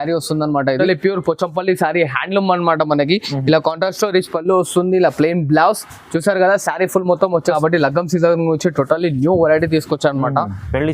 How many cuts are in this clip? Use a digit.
2